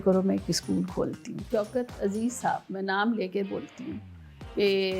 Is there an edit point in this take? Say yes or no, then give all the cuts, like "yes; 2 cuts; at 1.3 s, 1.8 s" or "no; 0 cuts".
yes; 1 cut; at 1.4 s